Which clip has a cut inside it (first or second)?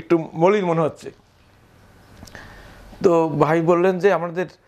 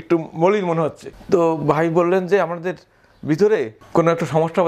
second